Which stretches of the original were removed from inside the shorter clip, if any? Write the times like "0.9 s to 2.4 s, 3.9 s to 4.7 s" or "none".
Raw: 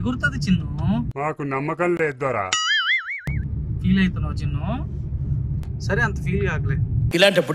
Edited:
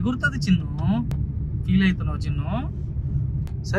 1.1 s to 3.3 s

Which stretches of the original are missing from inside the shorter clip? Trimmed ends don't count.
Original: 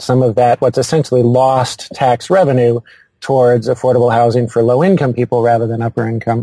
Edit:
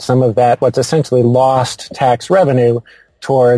none

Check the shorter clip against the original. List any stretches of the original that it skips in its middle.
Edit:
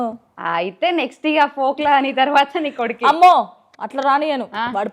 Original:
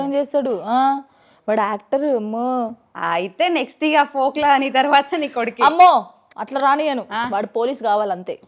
none

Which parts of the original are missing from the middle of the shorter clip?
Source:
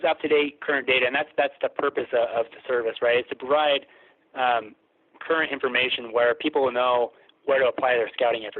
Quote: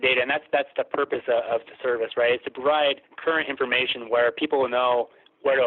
3.9 s to 5.1 s

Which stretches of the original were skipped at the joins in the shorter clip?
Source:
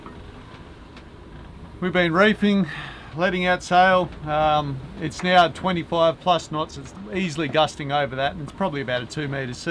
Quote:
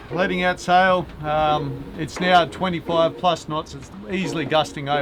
none

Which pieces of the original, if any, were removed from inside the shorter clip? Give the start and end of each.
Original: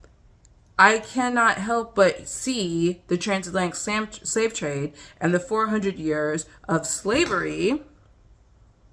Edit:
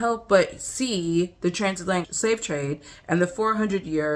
3.8 s to 4.2 s

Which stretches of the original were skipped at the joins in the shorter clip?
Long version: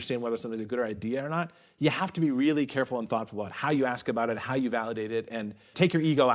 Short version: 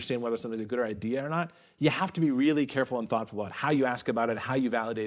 none

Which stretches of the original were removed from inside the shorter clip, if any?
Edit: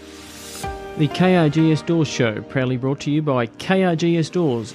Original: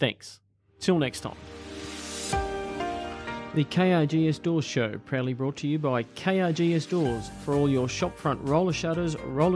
2.6 s to 3.5 s

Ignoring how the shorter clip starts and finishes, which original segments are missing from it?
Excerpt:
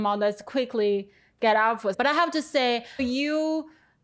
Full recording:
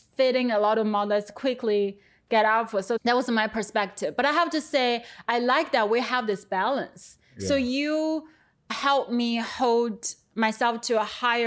2.8 s to 4.1 s, 5.2 s to 7.6 s

